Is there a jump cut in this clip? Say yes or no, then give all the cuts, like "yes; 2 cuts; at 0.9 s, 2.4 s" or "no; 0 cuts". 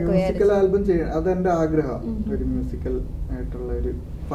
no; 0 cuts